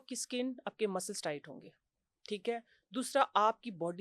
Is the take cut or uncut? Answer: uncut